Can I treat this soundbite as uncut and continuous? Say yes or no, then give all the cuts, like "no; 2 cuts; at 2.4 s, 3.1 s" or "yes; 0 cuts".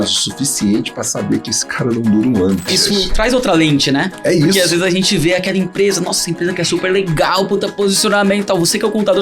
no; 1 cut; at 2.8 s